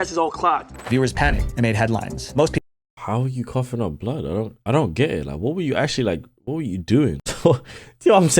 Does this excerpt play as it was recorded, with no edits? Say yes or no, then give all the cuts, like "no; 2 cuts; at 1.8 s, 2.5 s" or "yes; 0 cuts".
no; 1 cut; at 7.3 s